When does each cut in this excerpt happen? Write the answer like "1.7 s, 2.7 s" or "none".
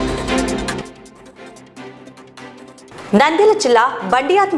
0.8 s, 2.8 s